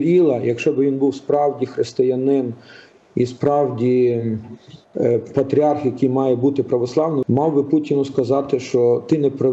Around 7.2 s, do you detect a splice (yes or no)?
yes